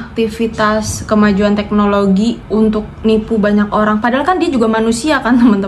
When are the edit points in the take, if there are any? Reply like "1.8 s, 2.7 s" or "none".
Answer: 2.4 s